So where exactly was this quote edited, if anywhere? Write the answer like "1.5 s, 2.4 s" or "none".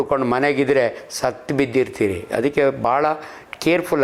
none

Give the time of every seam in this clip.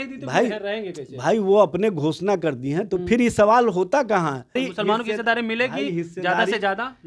4.7 s

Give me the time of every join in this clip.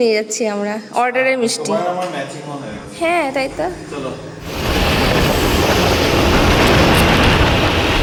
none

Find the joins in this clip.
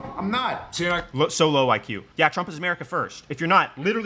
none

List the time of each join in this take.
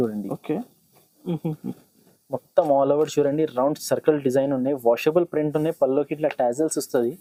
none

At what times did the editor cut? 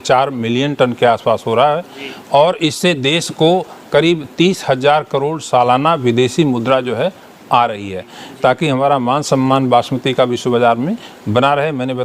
8.2 s

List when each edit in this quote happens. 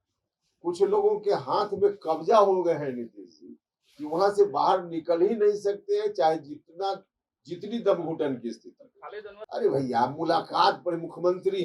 9.4 s

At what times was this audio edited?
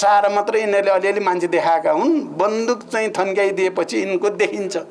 none

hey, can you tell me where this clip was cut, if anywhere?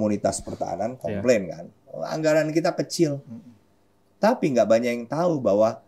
none

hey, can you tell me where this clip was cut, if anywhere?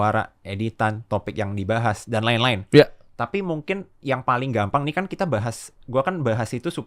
none

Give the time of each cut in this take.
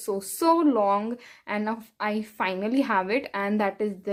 none

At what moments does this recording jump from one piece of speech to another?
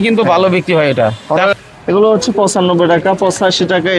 1.5 s

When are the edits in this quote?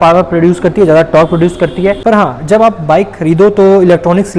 2.0 s

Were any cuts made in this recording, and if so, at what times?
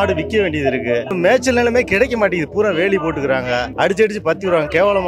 1.1 s

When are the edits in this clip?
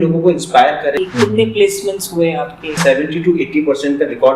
0.9 s, 2.6 s

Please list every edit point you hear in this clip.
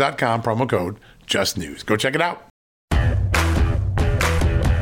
2.8 s

